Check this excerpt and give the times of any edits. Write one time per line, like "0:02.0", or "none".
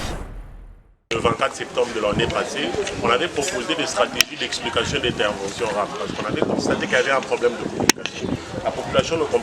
0:01.1